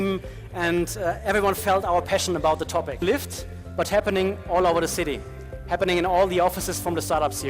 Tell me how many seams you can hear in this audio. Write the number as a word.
one